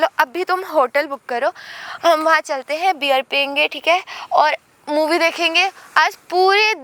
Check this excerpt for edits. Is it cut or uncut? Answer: uncut